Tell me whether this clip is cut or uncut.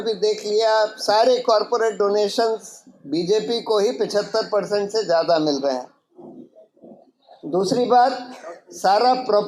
uncut